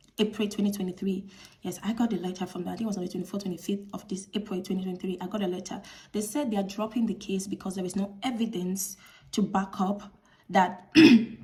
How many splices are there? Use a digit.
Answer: 0